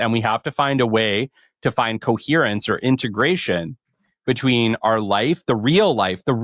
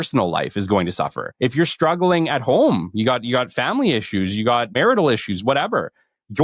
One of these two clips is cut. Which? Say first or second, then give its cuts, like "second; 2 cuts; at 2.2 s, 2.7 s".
second; 2 cuts; at 1.2 s, 4.8 s